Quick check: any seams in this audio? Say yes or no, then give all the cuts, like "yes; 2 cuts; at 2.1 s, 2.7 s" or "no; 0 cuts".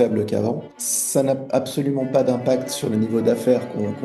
yes; 1 cut; at 2.8 s